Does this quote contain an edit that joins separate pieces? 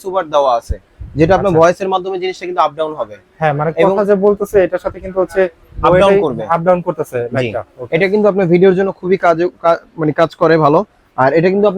no; 0 cuts

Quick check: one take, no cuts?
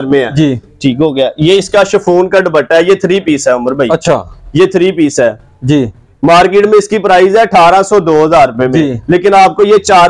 yes; 0 cuts

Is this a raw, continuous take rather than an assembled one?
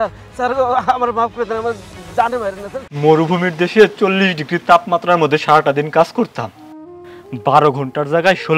no; 1 cut; at 2.8 s

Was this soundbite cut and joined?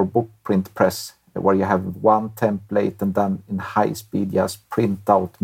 no; 0 cuts

